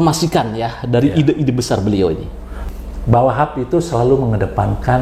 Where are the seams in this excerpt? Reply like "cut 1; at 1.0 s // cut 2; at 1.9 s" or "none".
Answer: cut 1; at 2.6 s